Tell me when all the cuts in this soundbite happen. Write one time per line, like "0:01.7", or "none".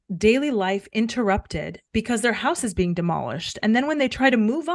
none